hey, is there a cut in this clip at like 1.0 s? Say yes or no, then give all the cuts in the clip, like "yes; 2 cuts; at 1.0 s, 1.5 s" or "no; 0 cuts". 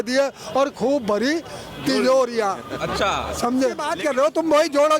no; 1 cut; at 3.9 s